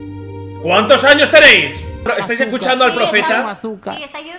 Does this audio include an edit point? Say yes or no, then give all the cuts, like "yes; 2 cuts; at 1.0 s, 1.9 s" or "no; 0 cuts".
yes; 1 cut; at 2.0 s